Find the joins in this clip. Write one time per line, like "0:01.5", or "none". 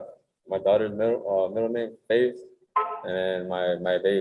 none